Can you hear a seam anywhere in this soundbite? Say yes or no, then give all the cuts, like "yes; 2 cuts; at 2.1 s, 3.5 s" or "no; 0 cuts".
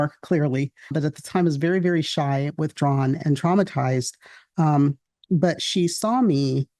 yes; 1 cut; at 0.9 s